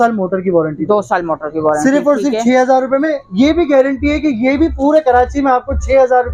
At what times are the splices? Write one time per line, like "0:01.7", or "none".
none